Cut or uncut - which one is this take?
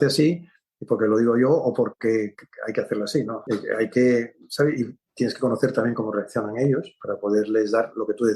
cut